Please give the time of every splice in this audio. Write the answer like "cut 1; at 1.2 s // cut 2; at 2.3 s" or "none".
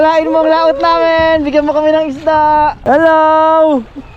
cut 1; at 2.8 s

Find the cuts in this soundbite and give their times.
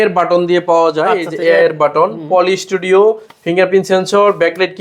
none

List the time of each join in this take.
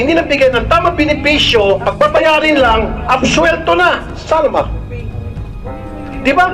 cut 1; at 1.9 s

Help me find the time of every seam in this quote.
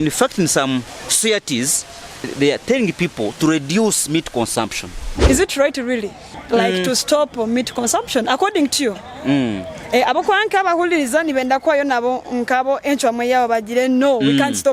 cut 1; at 1.0 s // cut 2; at 2.2 s // cut 3; at 5.2 s

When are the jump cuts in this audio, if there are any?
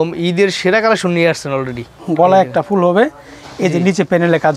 cut 1; at 1.9 s

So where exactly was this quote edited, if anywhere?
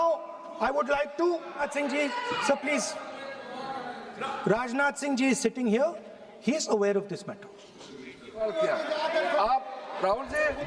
cut 1; at 1.7 s // cut 2; at 8.4 s

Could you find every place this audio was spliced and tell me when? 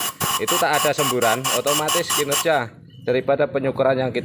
none

